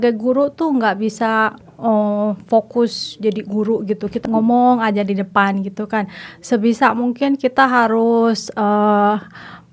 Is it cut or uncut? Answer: cut